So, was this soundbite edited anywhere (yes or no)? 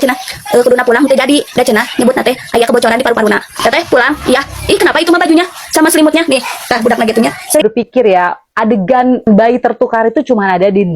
yes